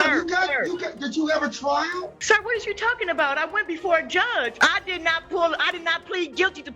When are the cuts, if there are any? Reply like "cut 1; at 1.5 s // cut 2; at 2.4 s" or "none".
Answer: cut 1; at 2.2 s // cut 2; at 4.5 s

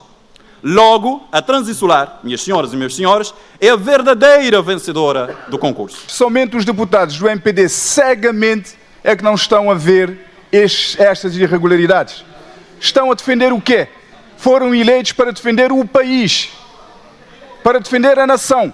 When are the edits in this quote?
cut 1; at 6.1 s

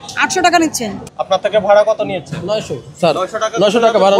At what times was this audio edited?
cut 1; at 1.1 s

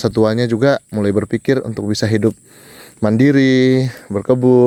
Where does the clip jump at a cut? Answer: none

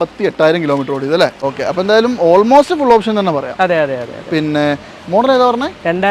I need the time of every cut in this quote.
cut 1; at 1.4 s

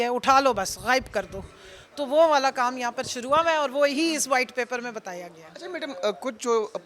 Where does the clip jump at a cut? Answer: none

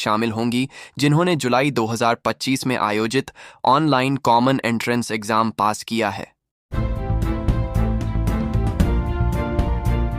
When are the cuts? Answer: cut 1; at 6.3 s

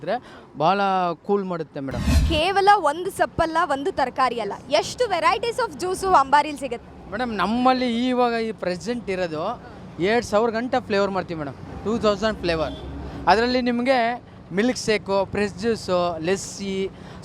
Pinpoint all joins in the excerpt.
cut 1; at 2.2 s

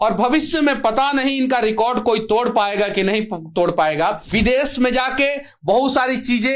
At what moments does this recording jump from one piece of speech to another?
cut 1; at 4.2 s

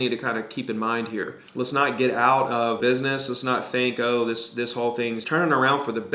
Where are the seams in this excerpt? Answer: cut 1; at 1.4 s // cut 2; at 2.8 s // cut 3; at 5.2 s

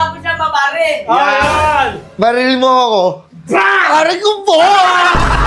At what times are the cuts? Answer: none

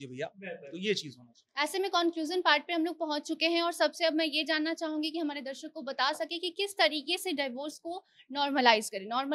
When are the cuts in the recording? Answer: none

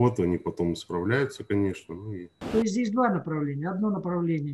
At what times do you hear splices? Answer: cut 1; at 2.4 s

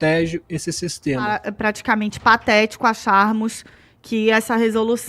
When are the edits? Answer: cut 1; at 1.5 s

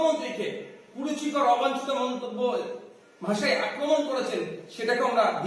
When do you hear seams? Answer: none

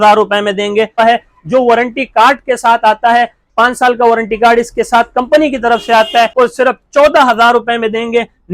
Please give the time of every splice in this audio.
cut 1; at 1.0 s // cut 2; at 6.3 s

